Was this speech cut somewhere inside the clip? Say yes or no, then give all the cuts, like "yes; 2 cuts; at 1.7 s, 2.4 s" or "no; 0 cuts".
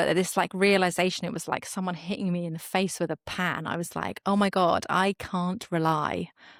no; 0 cuts